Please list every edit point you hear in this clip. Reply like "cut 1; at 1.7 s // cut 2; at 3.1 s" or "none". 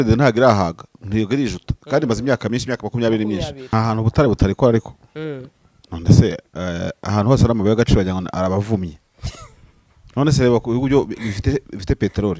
cut 1; at 3.6 s